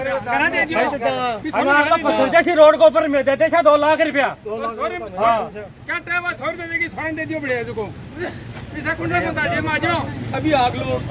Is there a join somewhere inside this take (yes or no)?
no